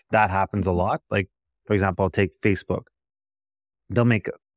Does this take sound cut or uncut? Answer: uncut